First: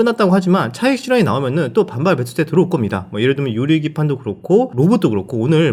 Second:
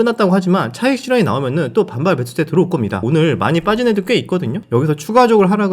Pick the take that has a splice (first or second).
second